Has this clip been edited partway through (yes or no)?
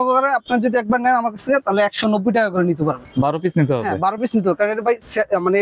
yes